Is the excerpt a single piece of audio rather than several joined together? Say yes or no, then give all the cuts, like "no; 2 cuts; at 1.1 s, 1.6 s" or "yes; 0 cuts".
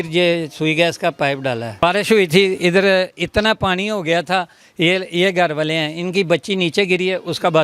no; 1 cut; at 1.8 s